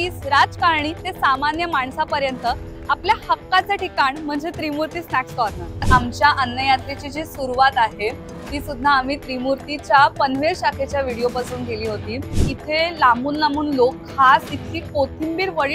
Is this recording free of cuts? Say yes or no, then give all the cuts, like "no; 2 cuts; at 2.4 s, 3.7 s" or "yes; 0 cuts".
no; 2 cuts; at 5.9 s, 12.4 s